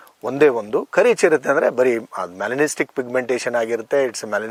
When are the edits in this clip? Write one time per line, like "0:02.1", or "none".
none